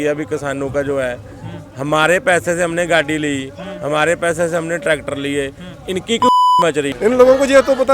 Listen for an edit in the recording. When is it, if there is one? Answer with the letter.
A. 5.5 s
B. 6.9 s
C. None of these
B